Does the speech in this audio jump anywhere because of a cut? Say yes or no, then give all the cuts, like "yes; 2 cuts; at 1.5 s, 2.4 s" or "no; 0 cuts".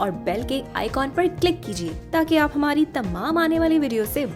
no; 0 cuts